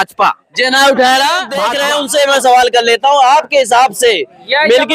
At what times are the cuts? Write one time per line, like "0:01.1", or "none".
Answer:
0:01.7